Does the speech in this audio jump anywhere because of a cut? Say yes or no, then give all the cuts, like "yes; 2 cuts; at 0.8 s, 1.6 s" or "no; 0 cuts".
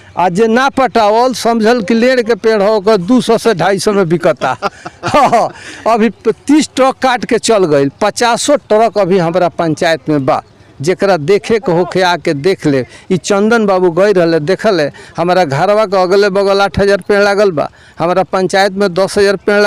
no; 0 cuts